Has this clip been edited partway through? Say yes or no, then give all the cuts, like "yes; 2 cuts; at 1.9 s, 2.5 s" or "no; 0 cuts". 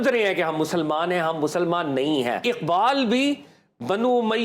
yes; 1 cut; at 2.4 s